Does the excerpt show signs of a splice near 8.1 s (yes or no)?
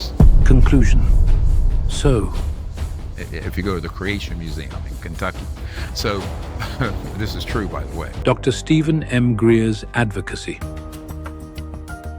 yes